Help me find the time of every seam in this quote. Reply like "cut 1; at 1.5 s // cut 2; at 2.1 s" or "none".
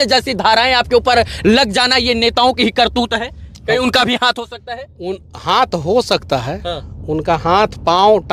none